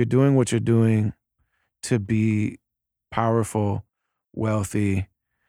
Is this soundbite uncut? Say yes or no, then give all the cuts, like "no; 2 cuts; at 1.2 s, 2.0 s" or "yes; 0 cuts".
no; 1 cut; at 2.9 s